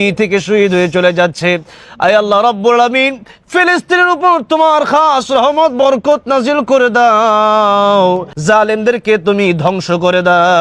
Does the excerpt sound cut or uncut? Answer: cut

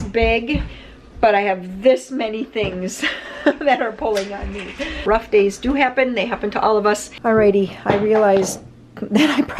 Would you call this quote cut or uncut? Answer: cut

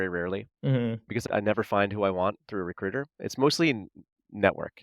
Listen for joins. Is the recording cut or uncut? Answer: uncut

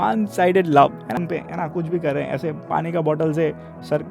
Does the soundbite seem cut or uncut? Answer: cut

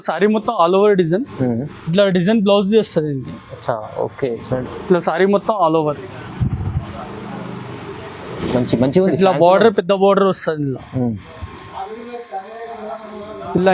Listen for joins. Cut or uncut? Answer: uncut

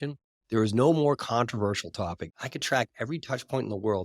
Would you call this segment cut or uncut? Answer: cut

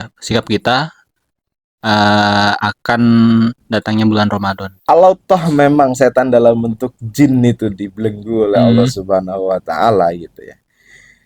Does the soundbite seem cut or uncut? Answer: cut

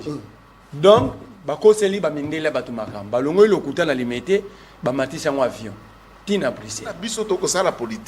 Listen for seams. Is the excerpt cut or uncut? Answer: cut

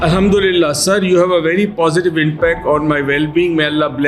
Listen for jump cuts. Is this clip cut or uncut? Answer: uncut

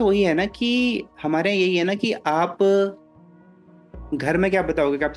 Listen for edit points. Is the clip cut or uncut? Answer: uncut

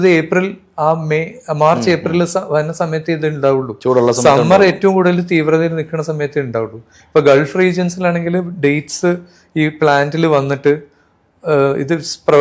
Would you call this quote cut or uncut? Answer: uncut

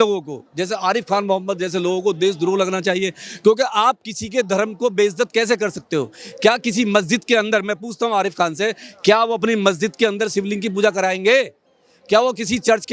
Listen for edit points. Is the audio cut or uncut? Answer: uncut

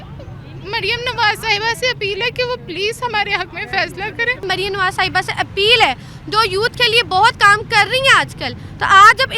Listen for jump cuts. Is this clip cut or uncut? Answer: cut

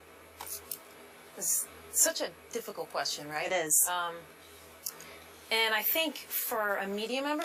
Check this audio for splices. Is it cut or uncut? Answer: cut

